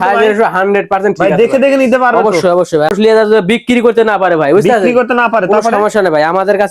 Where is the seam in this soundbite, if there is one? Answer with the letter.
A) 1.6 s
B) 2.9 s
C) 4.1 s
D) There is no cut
B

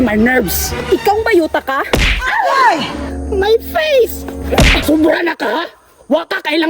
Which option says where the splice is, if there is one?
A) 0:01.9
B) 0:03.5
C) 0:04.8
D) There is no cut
C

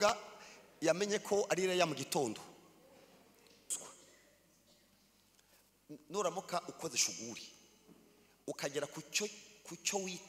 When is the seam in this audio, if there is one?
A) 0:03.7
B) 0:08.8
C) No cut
A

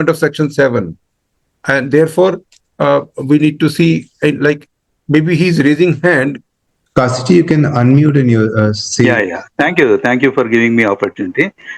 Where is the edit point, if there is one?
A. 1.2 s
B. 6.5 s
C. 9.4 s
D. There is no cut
B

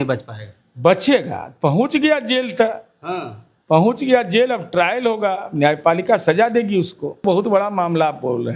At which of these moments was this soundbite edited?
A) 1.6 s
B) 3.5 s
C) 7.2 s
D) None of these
C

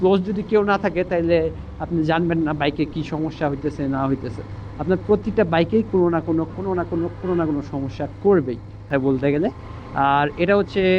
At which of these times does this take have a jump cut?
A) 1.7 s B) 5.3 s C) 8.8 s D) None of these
C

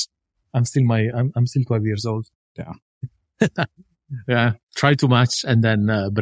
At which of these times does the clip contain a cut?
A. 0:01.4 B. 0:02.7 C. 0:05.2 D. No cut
B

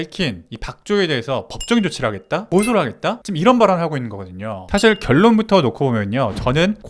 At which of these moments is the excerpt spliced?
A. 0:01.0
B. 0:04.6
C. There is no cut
B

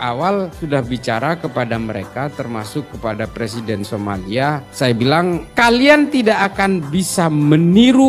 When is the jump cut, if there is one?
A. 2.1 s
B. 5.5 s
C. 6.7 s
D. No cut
B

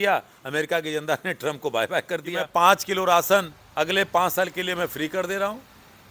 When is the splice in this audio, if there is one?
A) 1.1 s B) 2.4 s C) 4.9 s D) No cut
B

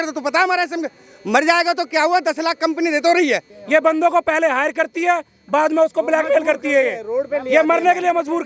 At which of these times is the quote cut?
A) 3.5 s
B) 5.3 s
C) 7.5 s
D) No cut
A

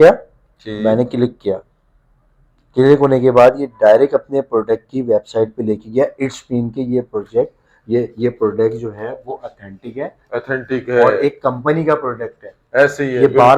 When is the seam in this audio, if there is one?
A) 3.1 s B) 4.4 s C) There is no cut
C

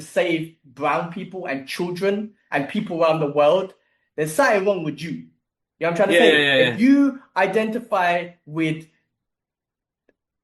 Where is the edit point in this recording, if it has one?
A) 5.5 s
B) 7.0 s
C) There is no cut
C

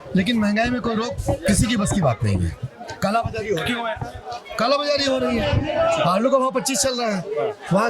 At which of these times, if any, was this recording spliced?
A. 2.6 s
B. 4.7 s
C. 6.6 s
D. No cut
D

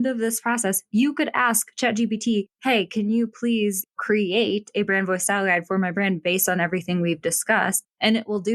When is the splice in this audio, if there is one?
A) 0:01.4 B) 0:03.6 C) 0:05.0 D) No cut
D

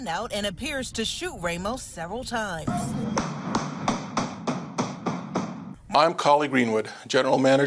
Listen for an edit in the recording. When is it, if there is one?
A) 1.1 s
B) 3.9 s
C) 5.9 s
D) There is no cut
C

